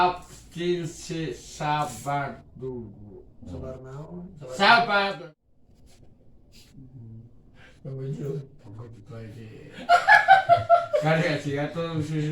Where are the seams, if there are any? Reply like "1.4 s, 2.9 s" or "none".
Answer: 5.2 s